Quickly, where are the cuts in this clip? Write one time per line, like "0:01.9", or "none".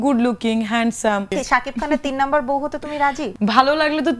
0:01.3
0:03.2